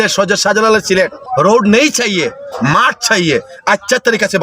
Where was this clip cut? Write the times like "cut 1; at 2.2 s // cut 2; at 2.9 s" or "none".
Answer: cut 1; at 1.2 s